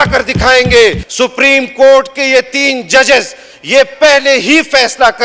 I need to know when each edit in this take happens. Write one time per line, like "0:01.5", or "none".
0:01.0